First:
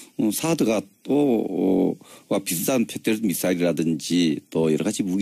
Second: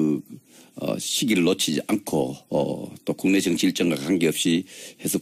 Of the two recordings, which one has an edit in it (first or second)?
second